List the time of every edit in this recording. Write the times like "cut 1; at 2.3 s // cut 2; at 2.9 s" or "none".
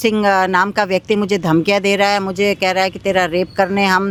none